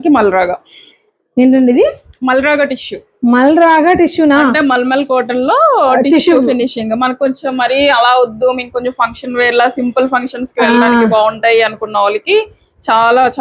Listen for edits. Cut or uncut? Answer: uncut